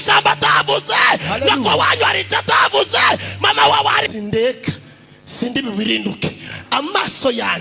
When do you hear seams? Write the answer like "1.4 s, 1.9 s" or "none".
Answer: 4.1 s